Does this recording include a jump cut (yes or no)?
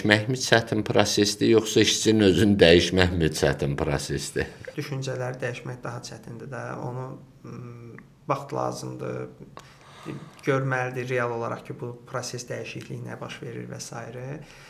no